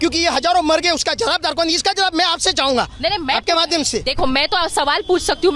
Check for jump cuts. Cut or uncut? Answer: uncut